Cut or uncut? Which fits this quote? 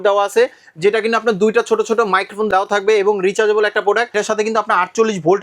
cut